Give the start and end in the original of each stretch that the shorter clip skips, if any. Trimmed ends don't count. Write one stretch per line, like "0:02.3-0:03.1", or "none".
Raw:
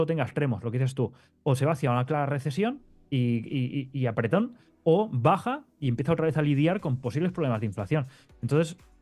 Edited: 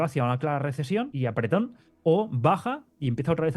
0:02.8-0:03.9